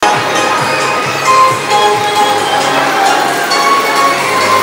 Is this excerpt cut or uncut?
uncut